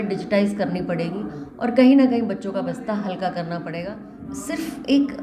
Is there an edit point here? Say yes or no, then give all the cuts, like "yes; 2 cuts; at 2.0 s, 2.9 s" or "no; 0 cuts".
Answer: yes; 1 cut; at 4.2 s